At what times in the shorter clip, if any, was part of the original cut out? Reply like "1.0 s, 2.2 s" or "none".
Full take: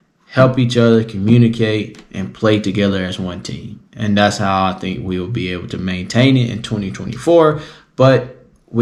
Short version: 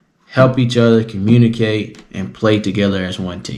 none